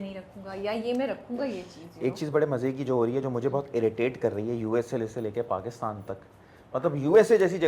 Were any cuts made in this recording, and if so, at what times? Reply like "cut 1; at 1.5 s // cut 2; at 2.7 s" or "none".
none